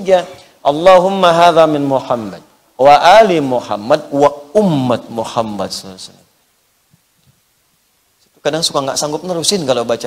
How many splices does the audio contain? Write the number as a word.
zero